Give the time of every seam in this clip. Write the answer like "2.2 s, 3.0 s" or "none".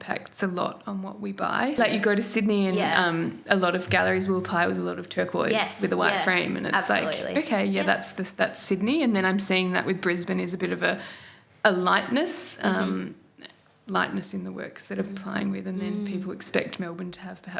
1.8 s

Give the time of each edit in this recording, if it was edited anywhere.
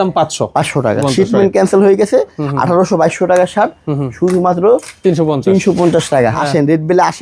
1.0 s, 6.4 s

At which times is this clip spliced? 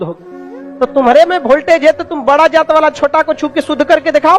none

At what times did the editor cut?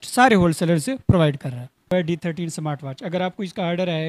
1.9 s

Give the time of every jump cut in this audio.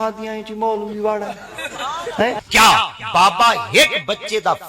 2.4 s

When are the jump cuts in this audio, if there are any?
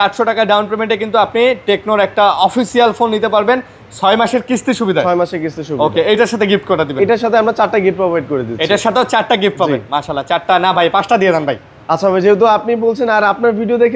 none

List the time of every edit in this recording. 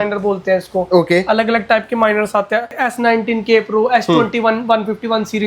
2.8 s

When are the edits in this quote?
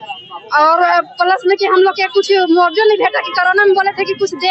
none

